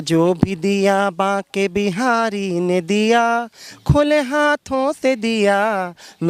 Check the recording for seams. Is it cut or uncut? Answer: uncut